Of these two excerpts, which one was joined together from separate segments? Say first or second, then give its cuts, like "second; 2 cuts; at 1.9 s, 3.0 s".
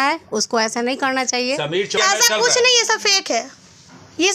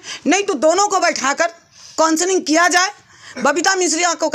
first; 1 cut; at 1.9 s